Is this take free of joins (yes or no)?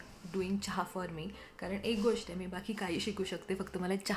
yes